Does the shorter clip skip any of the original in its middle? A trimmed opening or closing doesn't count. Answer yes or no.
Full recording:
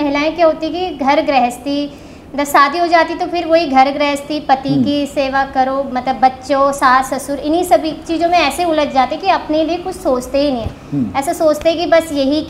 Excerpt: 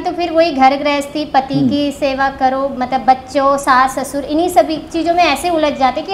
no